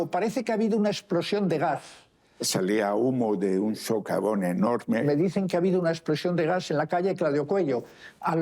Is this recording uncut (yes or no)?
no